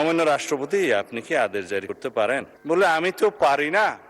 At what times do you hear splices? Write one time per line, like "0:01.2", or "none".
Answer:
0:02.5